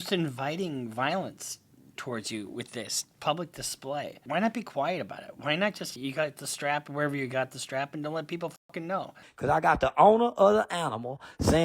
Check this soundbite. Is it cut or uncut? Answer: cut